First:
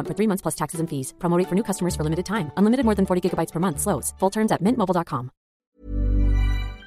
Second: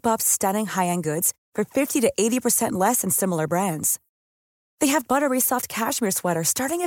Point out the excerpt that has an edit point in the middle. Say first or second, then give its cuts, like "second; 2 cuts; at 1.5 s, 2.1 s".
first; 1 cut; at 5.7 s